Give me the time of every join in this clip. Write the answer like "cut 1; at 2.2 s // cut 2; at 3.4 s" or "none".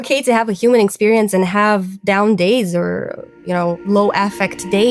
cut 1; at 3.8 s